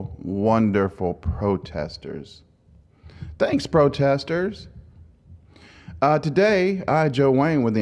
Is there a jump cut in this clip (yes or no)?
yes